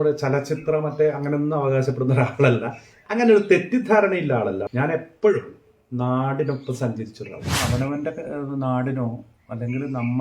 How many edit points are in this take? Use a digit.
2